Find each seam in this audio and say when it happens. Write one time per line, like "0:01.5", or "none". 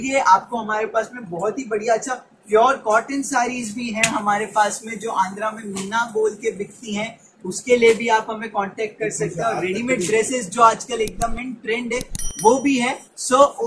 none